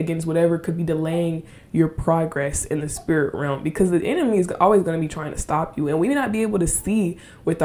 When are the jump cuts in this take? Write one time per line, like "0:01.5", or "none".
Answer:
none